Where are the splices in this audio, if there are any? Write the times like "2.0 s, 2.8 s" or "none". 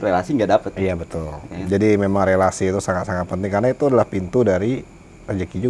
none